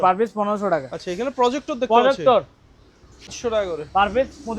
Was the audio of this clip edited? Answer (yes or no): yes